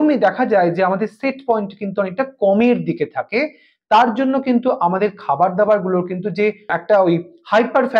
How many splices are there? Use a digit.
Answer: 1